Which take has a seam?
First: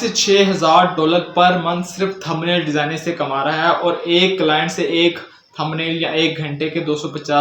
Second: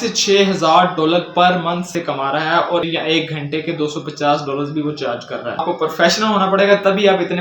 second; 3 cuts; at 1.9 s, 2.9 s, 5.6 s

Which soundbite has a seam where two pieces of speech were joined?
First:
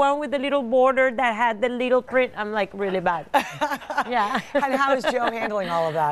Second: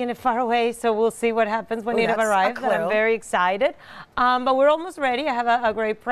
second; 1 cut; at 3.3 s

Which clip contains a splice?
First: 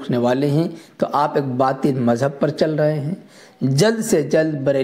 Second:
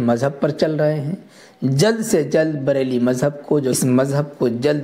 second; 1 cut; at 3.8 s

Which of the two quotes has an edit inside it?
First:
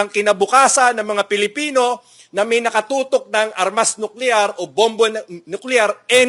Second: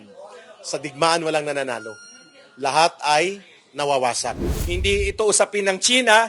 second; 1 cut; at 4.5 s

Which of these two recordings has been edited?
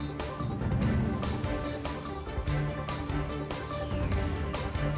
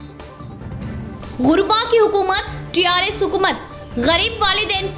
second; 1 cut; at 1.0 s

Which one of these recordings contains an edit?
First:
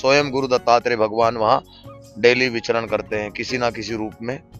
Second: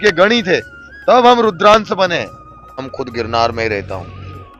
second; 1 cut; at 2.9 s

